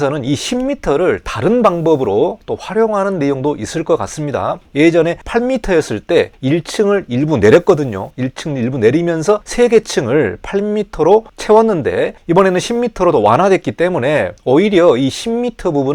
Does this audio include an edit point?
no; 0 cuts

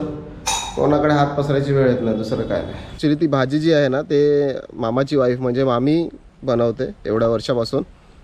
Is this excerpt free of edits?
no; 1 cut; at 3.0 s

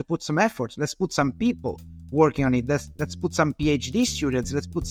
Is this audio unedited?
yes; 0 cuts

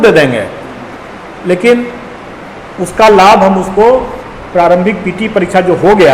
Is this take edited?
no; 0 cuts

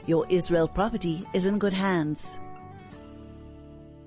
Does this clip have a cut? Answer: yes; 1 cut; at 2.2 s

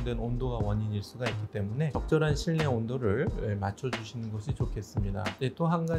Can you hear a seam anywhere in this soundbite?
no; 0 cuts

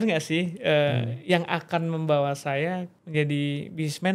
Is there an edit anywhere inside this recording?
yes; 1 cut; at 3.0 s

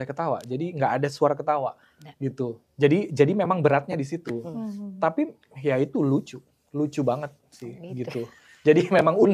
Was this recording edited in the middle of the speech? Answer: no; 0 cuts

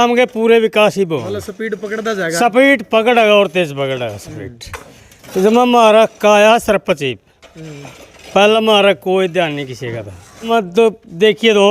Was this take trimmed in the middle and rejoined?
yes; 1 cut; at 10.5 s

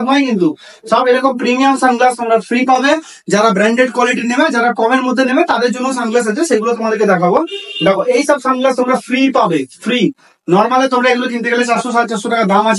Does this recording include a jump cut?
no; 0 cuts

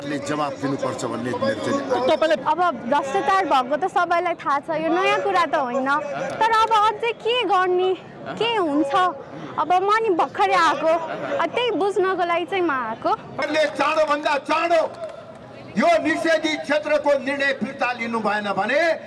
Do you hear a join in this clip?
yes; 2 cuts; at 2.4 s, 13.3 s

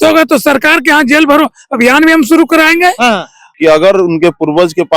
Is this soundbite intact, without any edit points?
no; 1 cut; at 3.4 s

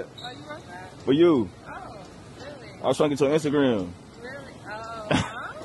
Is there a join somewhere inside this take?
no; 0 cuts

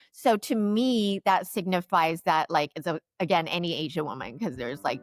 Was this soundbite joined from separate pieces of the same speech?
no; 0 cuts

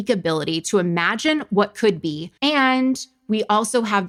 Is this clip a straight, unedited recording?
yes; 0 cuts

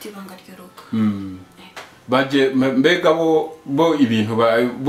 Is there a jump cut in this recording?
no; 0 cuts

